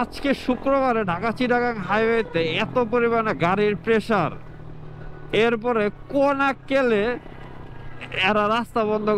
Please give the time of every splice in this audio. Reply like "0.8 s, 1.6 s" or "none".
none